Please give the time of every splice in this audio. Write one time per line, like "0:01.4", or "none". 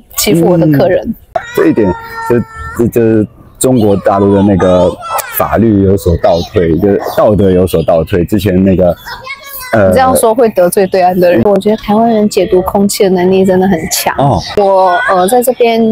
0:01.3
0:11.4